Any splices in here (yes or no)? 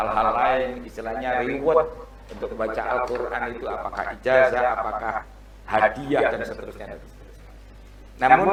no